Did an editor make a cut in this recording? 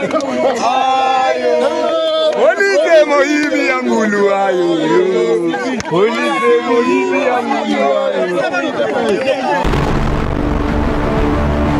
yes; 1 cut; at 9.7 s

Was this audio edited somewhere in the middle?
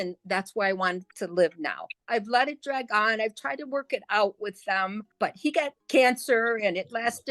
yes; 2 cuts; at 2.0 s, 5.6 s

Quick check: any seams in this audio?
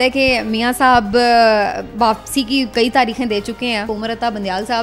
yes; 1 cut; at 3.9 s

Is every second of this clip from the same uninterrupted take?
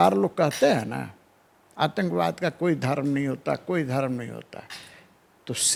yes; 0 cuts

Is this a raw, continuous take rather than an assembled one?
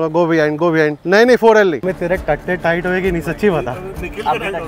no; 2 cuts; at 1.0 s, 1.8 s

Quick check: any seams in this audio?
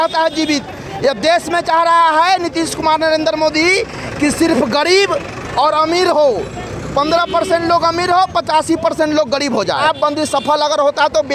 yes; 1 cut; at 9.8 s

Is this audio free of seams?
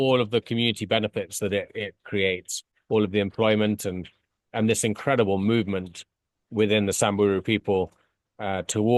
yes; 0 cuts

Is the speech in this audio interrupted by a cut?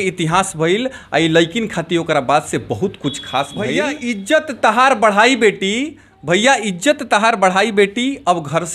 yes; 1 cut; at 3.9 s

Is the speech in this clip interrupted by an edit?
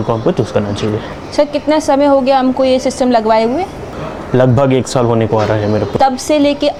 no; 0 cuts

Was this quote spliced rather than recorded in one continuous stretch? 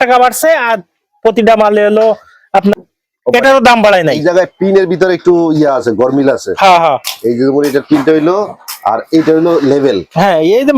yes; 1 cut; at 2.7 s

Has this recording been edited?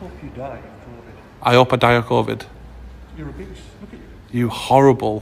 yes; 1 cut; at 1.3 s

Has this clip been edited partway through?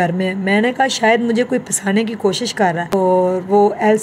yes; 1 cut; at 2.9 s

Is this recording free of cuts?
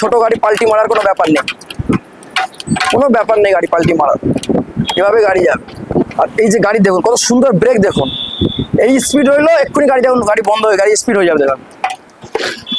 yes; 0 cuts

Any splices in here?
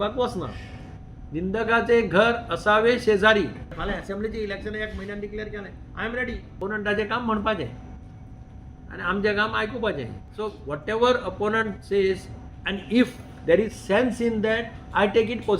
yes; 3 cuts; at 3.7 s, 6.5 s, 10.2 s

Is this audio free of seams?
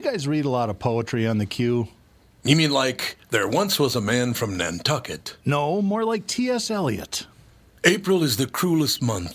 yes; 0 cuts

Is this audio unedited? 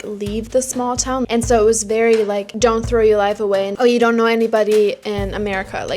no; 2 cuts; at 1.2 s, 2.5 s

